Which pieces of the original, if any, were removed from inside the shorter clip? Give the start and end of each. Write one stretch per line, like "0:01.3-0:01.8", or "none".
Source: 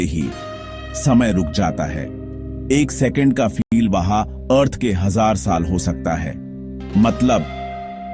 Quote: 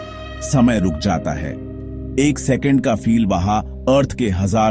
0:03.6-0:03.7